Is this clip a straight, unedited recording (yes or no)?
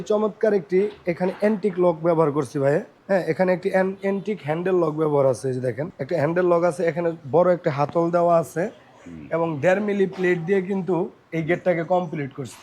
no